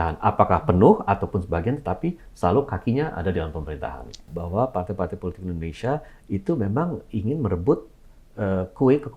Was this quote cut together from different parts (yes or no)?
yes